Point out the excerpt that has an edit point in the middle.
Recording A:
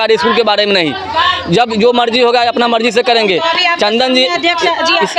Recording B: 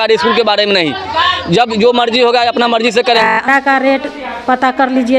B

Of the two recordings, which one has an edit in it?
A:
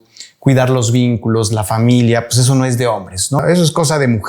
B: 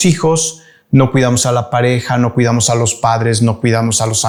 A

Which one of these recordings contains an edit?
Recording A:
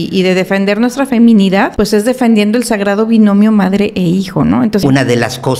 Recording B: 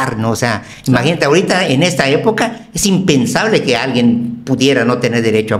A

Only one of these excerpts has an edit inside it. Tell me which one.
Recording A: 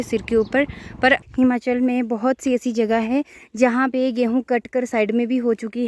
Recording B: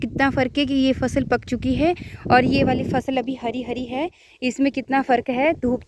A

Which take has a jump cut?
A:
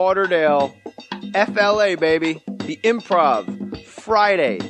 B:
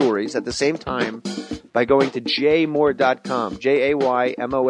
B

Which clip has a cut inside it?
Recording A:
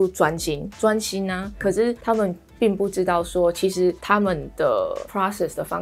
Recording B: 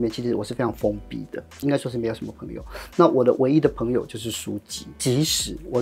B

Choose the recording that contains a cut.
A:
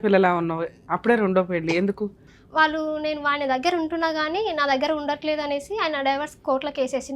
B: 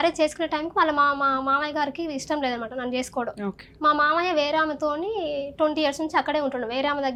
A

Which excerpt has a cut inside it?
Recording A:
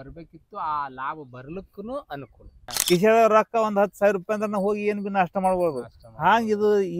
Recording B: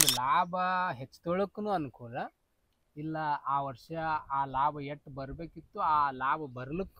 A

